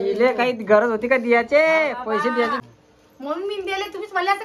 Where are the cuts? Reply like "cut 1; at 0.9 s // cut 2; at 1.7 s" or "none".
cut 1; at 2.6 s